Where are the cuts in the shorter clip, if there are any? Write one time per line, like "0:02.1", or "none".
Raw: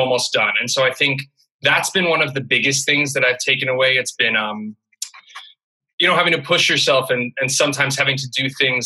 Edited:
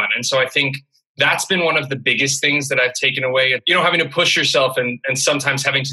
0:03.6